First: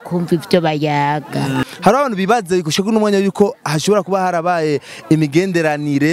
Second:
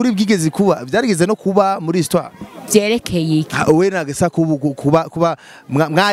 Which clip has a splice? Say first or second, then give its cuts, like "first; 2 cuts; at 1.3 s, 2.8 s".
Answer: first; 1 cut; at 1.6 s